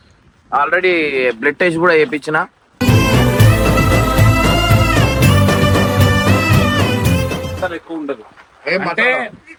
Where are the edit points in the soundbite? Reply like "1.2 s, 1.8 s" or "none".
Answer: none